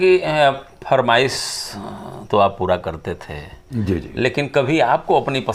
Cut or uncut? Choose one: uncut